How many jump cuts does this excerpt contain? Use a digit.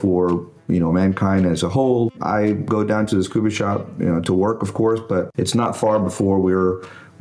2